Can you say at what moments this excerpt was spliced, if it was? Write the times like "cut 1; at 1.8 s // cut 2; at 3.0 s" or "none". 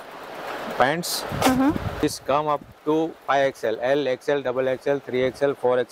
cut 1; at 2.0 s